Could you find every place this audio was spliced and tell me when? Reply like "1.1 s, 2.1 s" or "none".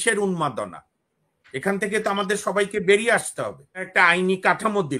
3.9 s